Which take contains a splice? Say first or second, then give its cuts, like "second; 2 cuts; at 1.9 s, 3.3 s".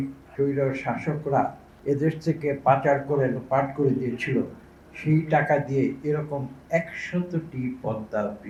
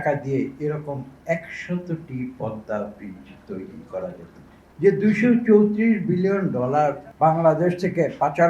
second; 1 cut; at 4.6 s